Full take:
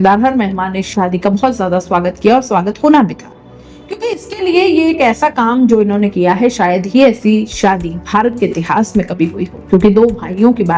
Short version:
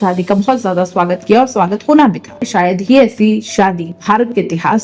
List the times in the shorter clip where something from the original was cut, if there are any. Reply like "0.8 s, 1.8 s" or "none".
2.5 s